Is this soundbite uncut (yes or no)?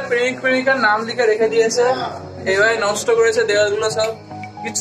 yes